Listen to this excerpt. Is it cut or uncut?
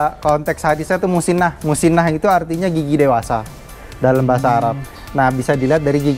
uncut